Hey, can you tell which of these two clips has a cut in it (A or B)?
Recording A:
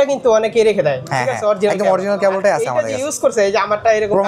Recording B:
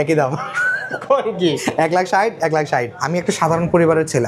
B